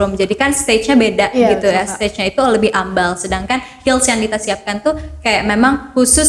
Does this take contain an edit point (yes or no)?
no